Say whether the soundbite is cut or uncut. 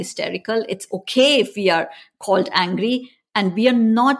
uncut